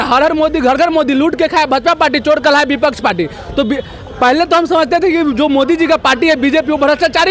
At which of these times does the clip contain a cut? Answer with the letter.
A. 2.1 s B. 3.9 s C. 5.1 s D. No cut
D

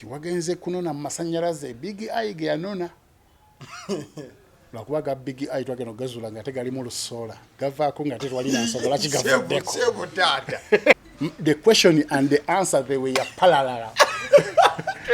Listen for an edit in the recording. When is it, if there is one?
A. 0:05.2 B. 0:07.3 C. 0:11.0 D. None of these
C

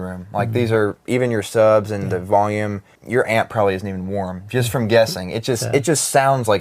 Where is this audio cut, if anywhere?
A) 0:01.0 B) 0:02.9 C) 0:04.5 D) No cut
B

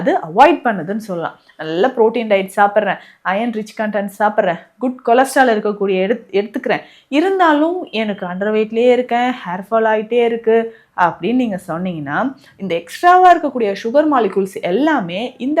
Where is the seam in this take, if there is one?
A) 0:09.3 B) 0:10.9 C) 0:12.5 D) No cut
D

